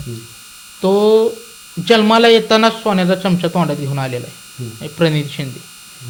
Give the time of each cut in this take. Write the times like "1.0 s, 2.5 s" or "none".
none